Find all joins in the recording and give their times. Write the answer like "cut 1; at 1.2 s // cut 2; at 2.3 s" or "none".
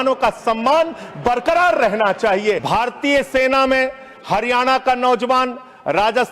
cut 1; at 2.6 s